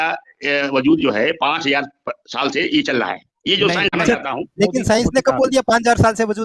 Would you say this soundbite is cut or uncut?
cut